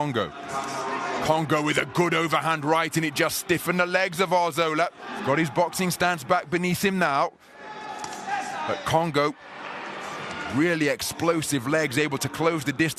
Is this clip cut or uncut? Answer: uncut